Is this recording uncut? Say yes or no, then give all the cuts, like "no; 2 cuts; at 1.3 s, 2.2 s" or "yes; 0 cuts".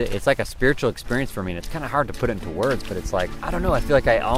no; 1 cut; at 3.4 s